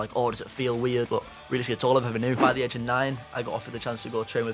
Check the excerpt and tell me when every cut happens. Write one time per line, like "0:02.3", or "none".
0:01.1
0:02.4